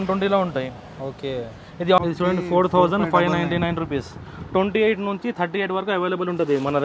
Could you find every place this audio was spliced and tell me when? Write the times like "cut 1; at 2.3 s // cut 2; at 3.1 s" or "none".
cut 1; at 2.0 s